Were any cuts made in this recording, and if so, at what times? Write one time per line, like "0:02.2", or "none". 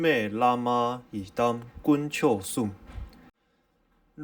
0:03.3